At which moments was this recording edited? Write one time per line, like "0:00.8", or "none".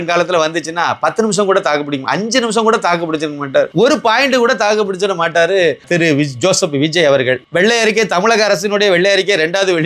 0:03.7
0:05.9
0:07.4